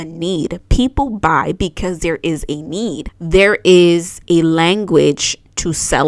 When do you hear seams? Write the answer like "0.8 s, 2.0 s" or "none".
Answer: 3.1 s